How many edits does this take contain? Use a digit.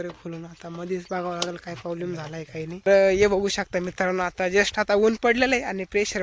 1